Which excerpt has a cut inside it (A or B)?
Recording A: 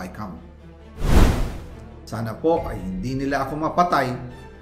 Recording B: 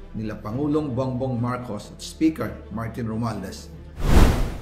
A